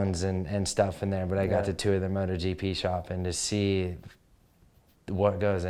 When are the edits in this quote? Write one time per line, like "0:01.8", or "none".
none